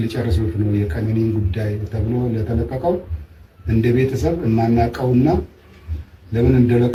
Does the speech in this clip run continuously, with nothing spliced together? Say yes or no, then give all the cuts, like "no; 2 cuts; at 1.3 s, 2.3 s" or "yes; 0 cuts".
yes; 0 cuts